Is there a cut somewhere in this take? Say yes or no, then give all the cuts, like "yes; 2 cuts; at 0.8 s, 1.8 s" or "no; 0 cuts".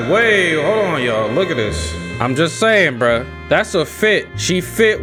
no; 0 cuts